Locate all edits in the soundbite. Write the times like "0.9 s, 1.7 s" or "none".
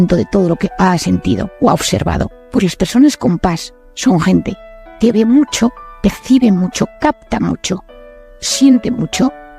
2.4 s, 5.9 s